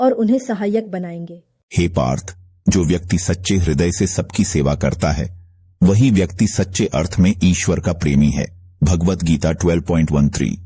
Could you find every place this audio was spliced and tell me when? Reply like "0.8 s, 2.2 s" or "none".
none